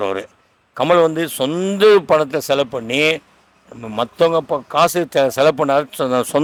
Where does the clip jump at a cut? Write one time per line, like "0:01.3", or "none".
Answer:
none